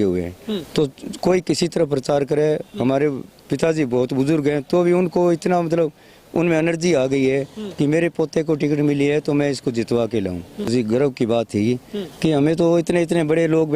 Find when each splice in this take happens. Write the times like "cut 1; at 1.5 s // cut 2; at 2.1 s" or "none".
cut 1; at 10.7 s

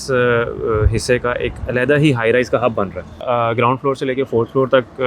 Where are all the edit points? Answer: cut 1; at 3.2 s

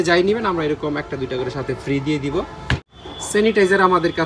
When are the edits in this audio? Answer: cut 1; at 3.0 s

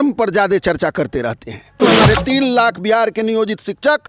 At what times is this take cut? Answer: cut 1; at 1.7 s

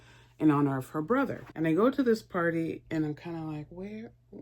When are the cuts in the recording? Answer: cut 1; at 1.4 s

